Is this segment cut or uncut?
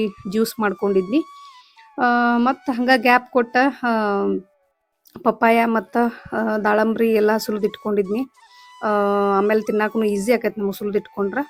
uncut